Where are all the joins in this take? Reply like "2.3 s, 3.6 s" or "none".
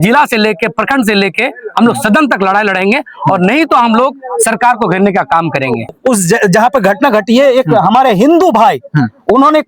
5.9 s